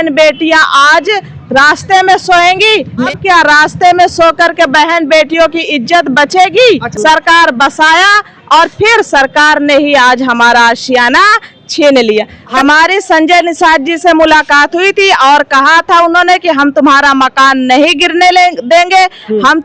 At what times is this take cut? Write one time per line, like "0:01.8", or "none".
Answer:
0:03.1
0:06.9
0:12.4